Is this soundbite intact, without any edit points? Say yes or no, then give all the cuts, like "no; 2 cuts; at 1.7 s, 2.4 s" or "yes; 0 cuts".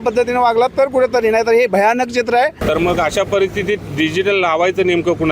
no; 1 cut; at 2.6 s